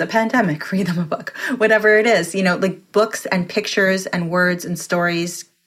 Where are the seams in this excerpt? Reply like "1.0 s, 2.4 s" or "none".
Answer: 2.8 s